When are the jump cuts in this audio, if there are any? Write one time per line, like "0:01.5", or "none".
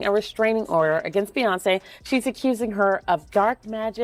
none